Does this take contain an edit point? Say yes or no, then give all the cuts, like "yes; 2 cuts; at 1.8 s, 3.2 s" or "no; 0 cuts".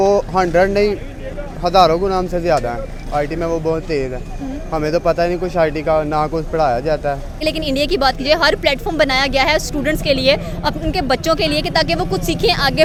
no; 0 cuts